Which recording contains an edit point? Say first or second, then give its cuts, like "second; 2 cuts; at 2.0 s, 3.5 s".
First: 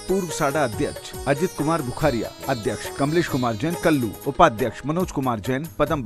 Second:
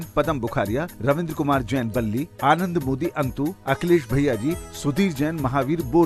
first; 2 cuts; at 2.8 s, 4.2 s